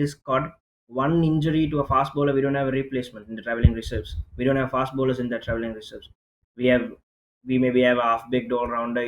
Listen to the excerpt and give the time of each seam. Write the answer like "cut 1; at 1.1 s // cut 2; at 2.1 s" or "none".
none